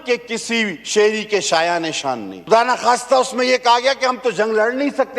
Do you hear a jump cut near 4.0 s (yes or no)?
no